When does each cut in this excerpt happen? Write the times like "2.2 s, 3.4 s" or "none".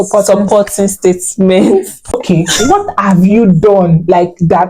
2.2 s